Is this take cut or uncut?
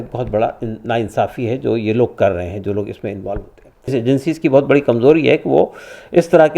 cut